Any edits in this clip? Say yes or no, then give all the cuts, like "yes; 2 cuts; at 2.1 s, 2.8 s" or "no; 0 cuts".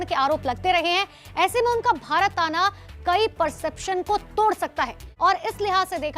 yes; 1 cut; at 5.0 s